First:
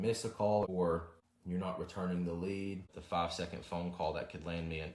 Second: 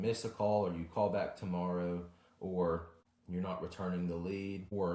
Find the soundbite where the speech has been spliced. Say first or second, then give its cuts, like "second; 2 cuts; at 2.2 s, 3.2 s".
first; 2 cuts; at 0.9 s, 2.8 s